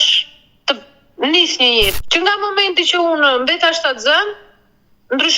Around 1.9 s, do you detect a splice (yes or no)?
yes